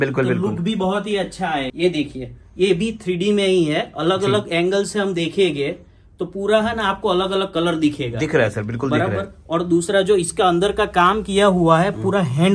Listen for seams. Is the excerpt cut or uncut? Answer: cut